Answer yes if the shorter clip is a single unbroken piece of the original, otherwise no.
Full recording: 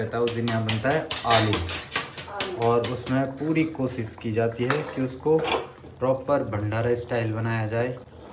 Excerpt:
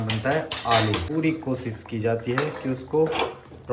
no